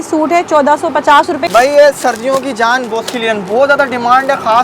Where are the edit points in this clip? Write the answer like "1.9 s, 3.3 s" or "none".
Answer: 1.5 s